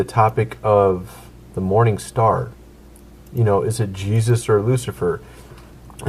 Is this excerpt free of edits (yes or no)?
yes